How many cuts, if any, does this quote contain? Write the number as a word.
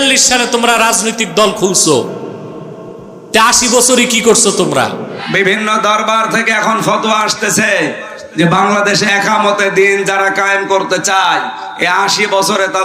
one